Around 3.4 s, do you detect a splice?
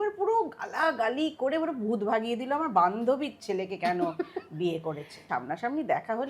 no; 1 cut; at 5.2 s

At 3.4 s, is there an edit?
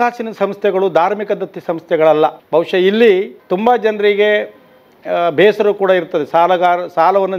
yes; 2 cuts; at 2.4 s, 3.4 s

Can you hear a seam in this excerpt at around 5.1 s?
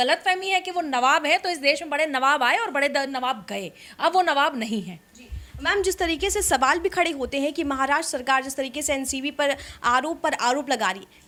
no; 0 cuts

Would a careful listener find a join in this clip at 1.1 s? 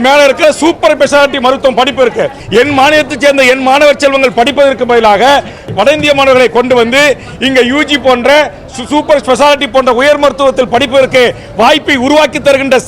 no; 2 cuts; at 2.4 s, 5.7 s

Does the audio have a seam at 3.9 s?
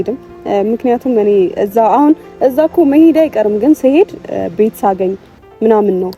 no; 0 cuts

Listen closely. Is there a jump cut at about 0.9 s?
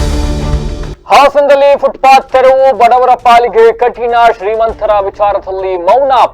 yes; 1 cut; at 0.9 s

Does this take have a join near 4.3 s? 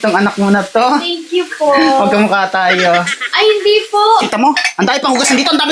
yes; 1 cut; at 4.3 s

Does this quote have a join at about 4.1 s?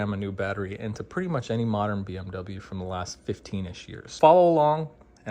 yes; 1 cut; at 4.1 s

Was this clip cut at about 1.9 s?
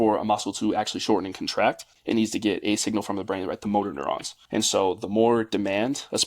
yes; 2 cuts; at 1.9 s, 4.3 s

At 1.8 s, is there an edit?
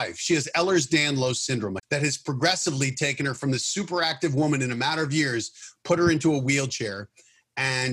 yes; 1 cut; at 1.8 s

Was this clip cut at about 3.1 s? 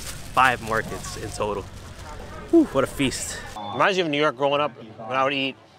yes; 1 cut; at 3.1 s

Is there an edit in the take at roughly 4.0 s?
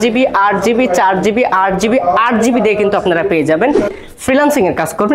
yes; 1 cut; at 4.0 s

